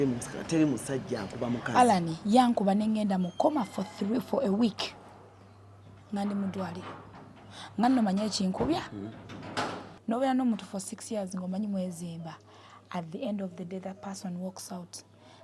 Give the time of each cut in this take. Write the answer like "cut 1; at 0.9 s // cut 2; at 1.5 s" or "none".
cut 1; at 9.9 s